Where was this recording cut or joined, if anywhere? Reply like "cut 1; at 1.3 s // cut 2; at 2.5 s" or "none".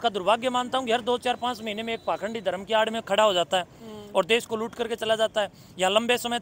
none

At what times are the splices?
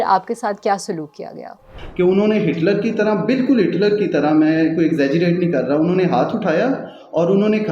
cut 1; at 1.4 s

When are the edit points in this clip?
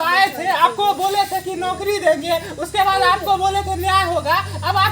none

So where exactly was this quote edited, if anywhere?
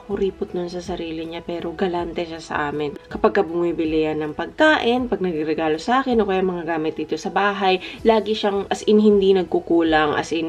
none

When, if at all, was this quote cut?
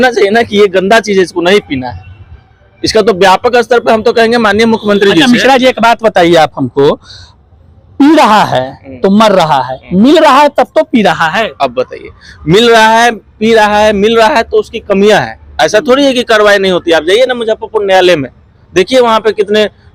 none

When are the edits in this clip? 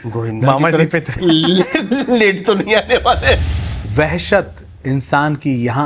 cut 1; at 3.6 s

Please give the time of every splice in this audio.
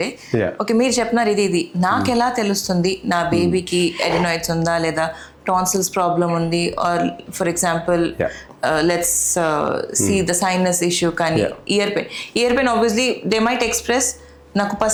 none

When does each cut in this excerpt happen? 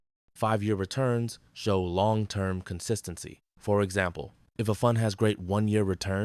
cut 1; at 0.9 s

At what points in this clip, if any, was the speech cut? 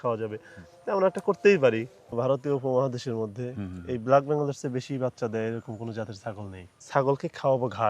cut 1; at 2.0 s // cut 2; at 6.7 s

